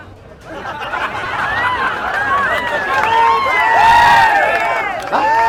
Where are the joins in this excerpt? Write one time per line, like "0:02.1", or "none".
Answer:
none